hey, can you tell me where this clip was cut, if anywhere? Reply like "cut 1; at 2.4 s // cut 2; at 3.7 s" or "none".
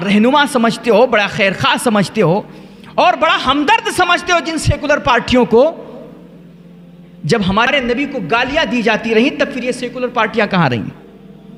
none